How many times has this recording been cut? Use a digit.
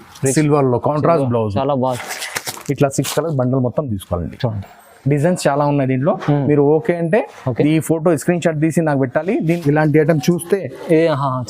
2